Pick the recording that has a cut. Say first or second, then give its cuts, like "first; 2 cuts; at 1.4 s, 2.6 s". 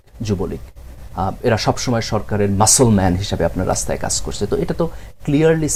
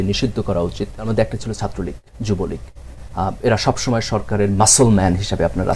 second; 1 cut; at 1.1 s